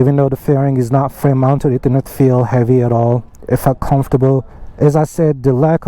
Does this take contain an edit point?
yes; 1 cut; at 4.6 s

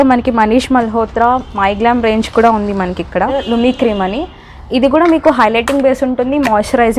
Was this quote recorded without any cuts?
no; 1 cut; at 3.4 s

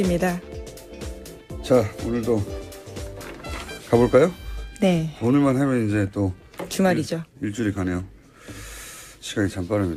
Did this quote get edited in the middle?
no; 0 cuts

